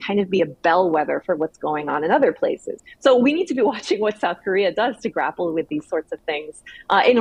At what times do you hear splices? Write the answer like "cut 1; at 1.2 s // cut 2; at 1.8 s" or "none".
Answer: none